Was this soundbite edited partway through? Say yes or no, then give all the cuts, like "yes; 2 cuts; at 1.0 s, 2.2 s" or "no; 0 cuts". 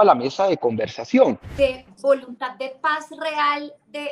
yes; 1 cut; at 1.5 s